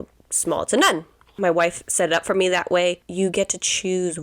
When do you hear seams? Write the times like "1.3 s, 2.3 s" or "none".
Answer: 1.4 s, 3.1 s